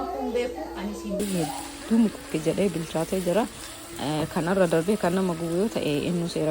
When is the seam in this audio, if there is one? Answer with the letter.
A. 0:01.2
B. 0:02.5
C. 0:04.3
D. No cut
A